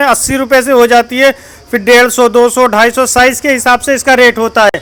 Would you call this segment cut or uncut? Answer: uncut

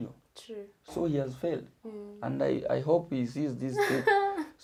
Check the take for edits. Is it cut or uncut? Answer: uncut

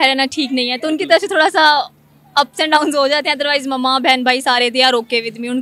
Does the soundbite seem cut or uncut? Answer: uncut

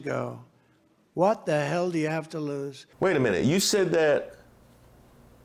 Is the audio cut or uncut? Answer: uncut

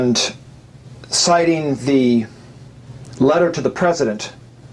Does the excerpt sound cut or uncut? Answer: cut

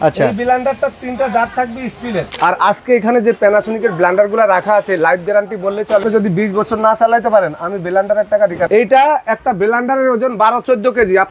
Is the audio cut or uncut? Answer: cut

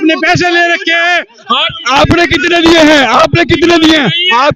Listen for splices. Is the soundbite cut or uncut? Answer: uncut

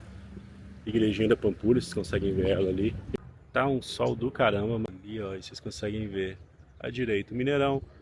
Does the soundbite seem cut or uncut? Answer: cut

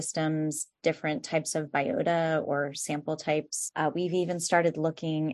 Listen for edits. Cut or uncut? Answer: uncut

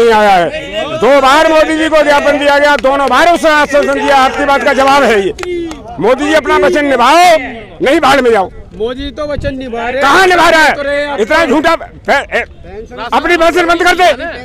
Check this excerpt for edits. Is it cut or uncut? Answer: uncut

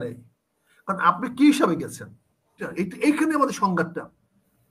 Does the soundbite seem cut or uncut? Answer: cut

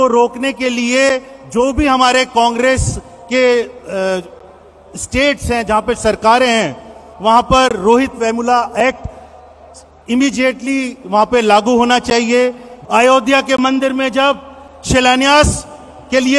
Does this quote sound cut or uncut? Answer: cut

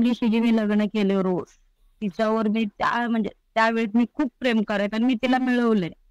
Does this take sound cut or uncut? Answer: uncut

